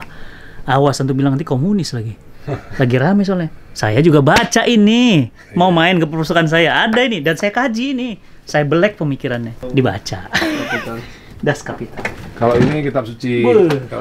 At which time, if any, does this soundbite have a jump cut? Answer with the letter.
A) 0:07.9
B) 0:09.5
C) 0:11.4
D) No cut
B